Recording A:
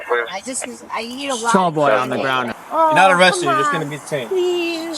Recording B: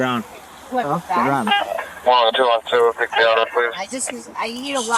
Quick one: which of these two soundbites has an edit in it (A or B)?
A